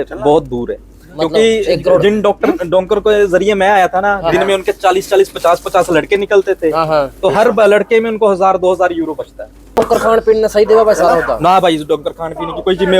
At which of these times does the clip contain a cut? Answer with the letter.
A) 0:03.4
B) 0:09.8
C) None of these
B